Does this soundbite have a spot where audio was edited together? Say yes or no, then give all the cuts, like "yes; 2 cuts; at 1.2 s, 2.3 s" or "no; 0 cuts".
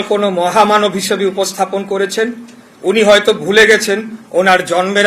no; 0 cuts